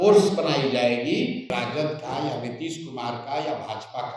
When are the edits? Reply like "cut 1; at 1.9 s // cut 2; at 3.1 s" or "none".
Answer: cut 1; at 1.5 s